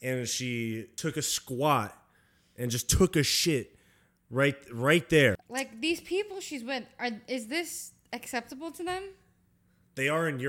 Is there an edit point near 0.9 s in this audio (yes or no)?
yes